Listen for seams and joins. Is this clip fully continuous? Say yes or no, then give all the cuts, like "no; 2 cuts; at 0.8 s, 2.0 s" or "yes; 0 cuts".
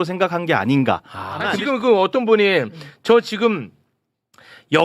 no; 1 cut; at 1.5 s